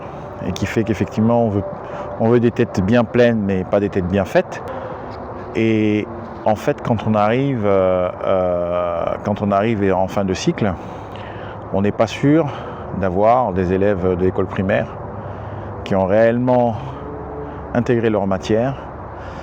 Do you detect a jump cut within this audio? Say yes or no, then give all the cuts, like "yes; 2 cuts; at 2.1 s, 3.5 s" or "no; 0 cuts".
no; 0 cuts